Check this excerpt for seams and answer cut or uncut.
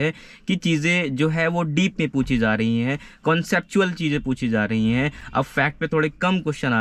uncut